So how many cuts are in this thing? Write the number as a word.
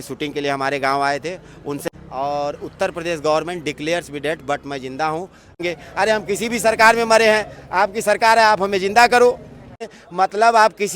three